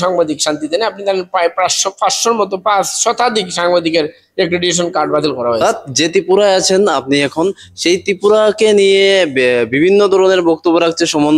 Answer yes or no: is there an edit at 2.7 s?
no